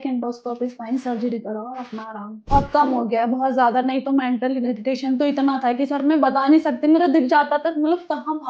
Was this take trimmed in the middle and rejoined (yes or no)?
yes